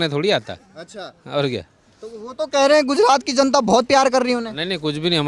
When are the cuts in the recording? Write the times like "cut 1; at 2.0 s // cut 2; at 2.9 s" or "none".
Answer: none